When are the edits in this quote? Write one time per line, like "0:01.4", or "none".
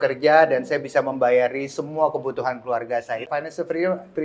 0:03.3